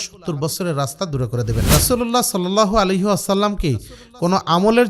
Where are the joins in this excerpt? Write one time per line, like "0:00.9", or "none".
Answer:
0:01.7